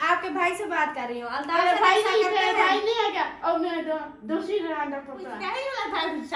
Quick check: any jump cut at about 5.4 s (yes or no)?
yes